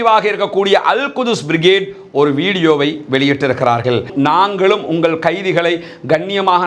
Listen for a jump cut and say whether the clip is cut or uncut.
cut